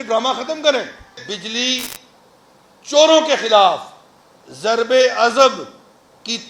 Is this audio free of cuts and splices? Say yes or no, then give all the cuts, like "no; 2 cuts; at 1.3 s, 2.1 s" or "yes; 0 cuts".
no; 1 cut; at 1.2 s